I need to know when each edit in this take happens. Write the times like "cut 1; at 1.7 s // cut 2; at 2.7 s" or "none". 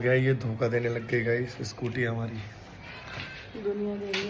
none